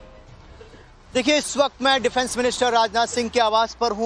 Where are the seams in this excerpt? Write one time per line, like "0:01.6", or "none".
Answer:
0:02.6